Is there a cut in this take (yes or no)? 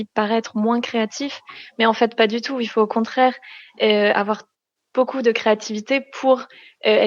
no